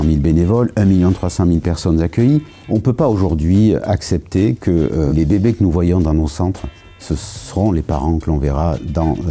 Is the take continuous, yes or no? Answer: no